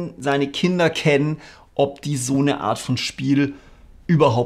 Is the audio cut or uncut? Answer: uncut